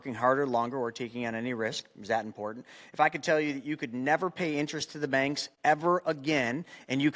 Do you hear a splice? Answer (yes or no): yes